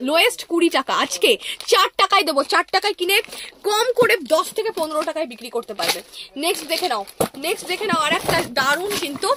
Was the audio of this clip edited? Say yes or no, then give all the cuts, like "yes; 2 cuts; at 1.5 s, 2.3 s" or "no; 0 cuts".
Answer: no; 0 cuts